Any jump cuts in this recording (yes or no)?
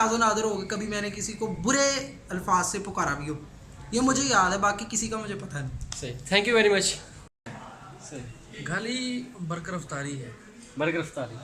yes